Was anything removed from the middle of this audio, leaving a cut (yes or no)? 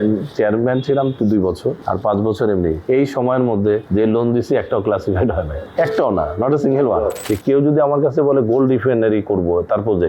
yes